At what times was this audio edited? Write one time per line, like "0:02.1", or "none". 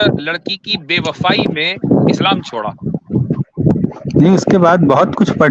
none